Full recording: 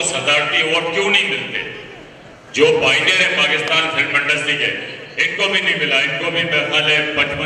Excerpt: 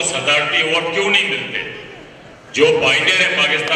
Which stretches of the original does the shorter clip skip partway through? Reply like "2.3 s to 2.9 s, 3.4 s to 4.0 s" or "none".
none